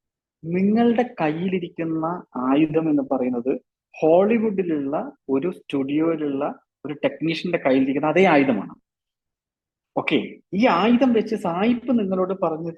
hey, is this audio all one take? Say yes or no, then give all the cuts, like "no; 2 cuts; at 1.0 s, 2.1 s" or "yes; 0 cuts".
yes; 0 cuts